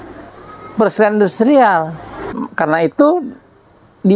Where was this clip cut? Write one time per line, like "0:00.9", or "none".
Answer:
0:02.4